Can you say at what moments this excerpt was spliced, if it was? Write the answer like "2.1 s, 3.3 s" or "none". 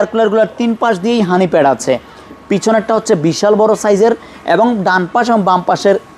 none

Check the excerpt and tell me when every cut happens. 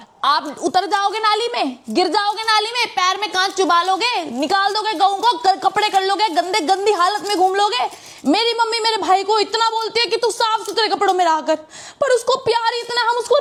none

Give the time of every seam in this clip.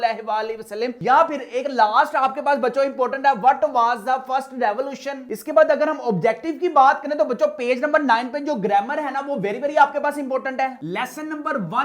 none

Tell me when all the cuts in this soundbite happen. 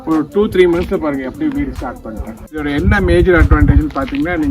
2.6 s

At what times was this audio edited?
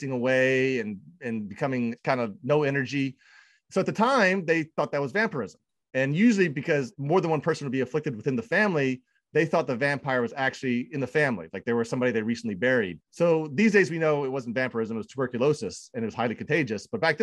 none

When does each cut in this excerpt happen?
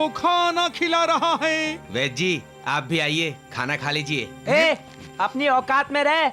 1.8 s

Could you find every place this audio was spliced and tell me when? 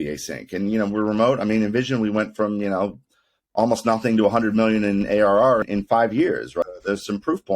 5.6 s, 6.6 s

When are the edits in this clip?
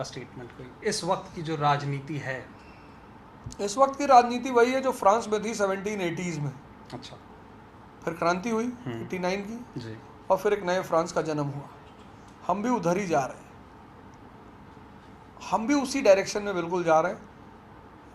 none

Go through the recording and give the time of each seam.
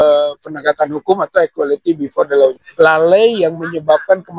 2.6 s

